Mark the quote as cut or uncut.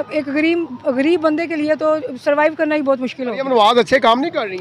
cut